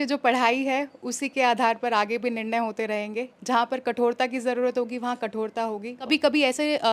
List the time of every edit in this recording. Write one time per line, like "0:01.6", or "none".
0:06.0